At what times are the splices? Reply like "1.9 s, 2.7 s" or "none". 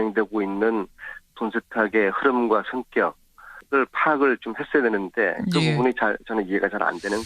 1.7 s